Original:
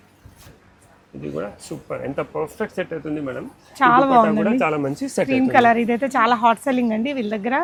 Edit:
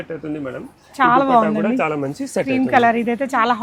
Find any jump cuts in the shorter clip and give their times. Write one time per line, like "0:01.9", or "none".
none